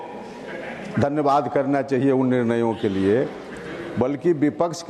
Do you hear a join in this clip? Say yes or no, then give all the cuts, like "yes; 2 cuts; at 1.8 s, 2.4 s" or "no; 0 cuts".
no; 0 cuts